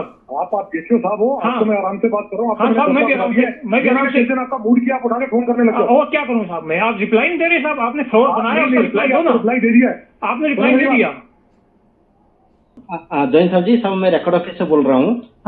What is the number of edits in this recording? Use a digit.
1